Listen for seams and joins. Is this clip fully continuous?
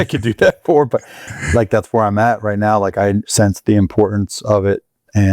no; 1 cut; at 3.3 s

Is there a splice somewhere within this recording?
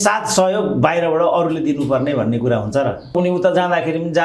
yes; 1 cut; at 3.1 s

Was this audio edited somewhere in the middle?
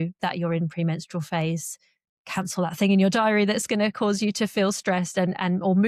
no; 0 cuts

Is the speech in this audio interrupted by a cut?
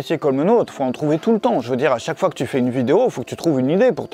no; 0 cuts

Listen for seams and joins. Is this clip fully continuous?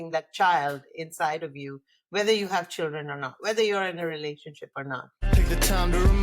no; 1 cut; at 5.2 s

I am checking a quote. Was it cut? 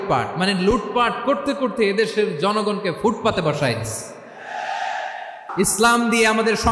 yes; 1 cut; at 5.4 s

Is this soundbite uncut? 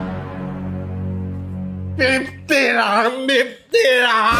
yes; 0 cuts

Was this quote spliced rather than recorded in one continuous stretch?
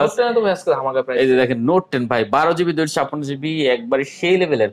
no; 0 cuts

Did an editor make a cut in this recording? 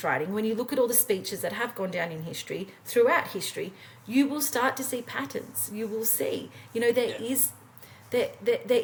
no; 0 cuts

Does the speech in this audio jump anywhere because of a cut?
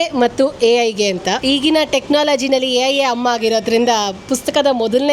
yes; 1 cut; at 1.4 s

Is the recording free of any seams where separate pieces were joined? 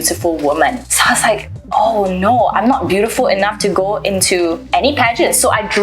no; 2 cuts; at 0.9 s, 4.6 s

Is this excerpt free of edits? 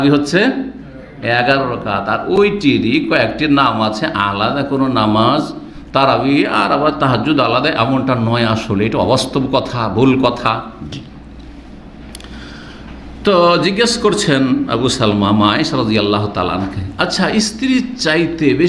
yes; 0 cuts

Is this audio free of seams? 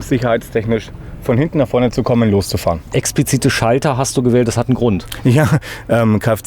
no; 1 cut; at 2.9 s

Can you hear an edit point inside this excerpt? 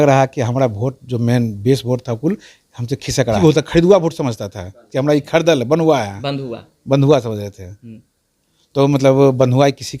yes; 1 cut; at 3.4 s

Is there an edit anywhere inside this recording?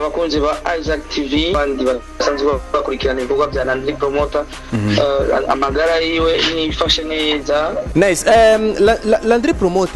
yes; 2 cuts; at 1.5 s, 7.9 s

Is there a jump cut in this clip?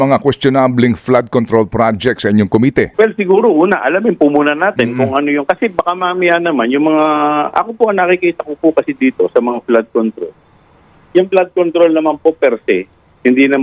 yes; 1 cut; at 2.9 s

